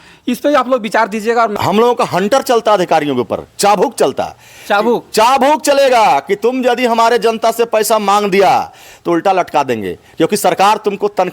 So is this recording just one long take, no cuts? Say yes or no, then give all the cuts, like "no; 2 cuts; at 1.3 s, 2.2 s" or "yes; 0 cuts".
no; 1 cut; at 1.5 s